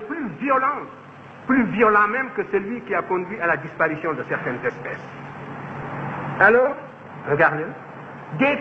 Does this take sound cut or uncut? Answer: cut